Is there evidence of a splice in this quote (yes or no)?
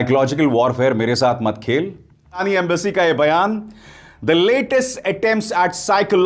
yes